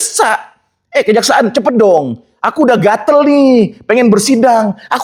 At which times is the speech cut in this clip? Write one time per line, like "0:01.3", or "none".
none